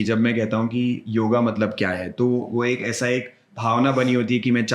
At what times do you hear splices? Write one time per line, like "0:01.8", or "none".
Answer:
none